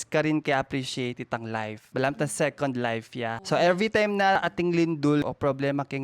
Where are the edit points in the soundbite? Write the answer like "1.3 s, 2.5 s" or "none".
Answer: 1.8 s, 3.4 s, 4.3 s, 5.2 s